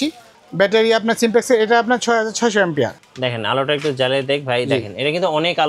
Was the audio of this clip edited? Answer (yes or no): yes